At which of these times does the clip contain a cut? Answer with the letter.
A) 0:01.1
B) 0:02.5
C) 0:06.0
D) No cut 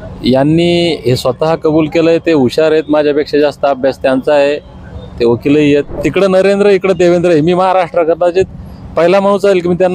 C